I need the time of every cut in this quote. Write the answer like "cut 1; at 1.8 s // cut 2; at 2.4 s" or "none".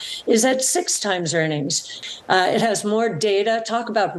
cut 1; at 2.0 s